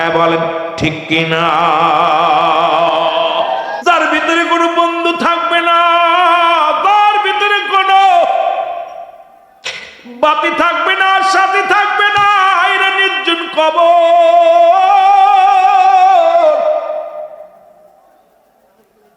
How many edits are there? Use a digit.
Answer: 1